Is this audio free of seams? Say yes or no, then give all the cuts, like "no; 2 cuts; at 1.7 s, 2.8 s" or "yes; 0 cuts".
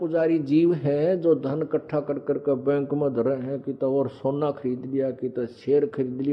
yes; 0 cuts